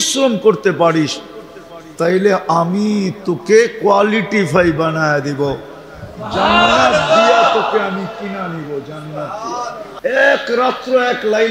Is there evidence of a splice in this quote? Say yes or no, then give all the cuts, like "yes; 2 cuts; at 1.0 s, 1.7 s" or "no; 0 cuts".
yes; 1 cut; at 9.9 s